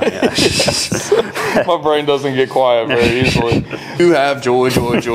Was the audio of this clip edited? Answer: yes; 1 cut; at 4.0 s

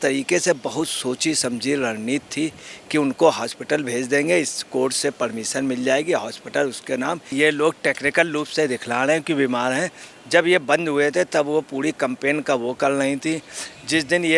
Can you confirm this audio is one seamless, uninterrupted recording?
no; 1 cut; at 7.3 s

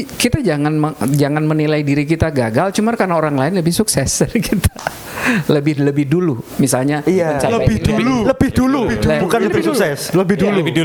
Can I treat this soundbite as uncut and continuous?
yes; 0 cuts

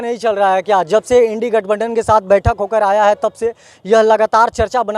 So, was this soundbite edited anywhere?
no; 0 cuts

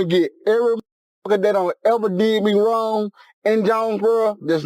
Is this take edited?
no; 0 cuts

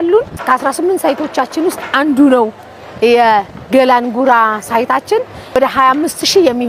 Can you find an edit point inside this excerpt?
yes; 1 cut; at 5.6 s

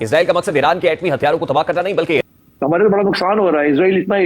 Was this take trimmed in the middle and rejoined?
yes; 1 cut; at 2.2 s

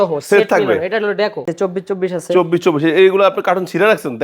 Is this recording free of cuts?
no; 1 cut; at 1.5 s

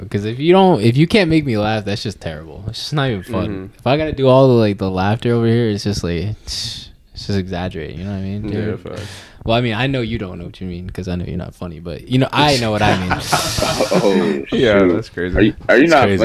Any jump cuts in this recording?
no; 0 cuts

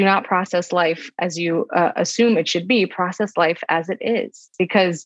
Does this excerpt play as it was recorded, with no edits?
yes; 0 cuts

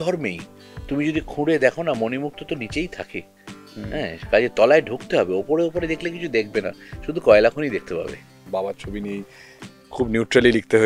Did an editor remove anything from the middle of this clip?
yes; 1 cut; at 8.5 s

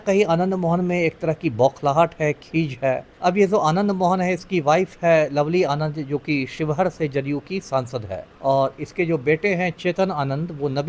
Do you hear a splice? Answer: yes; 2 cuts; at 3.1 s, 8.2 s

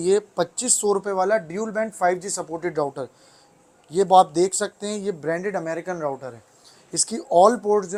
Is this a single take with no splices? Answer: yes; 0 cuts

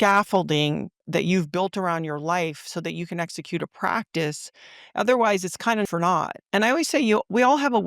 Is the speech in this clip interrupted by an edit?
yes; 1 cut; at 5.9 s

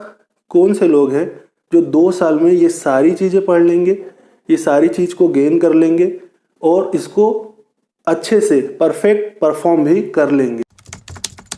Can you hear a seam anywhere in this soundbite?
yes; 1 cut; at 10.6 s

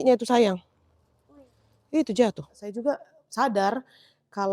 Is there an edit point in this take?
yes; 1 cut; at 2.7 s

